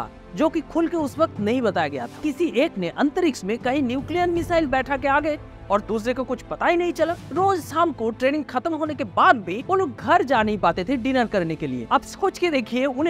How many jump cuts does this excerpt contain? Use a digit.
2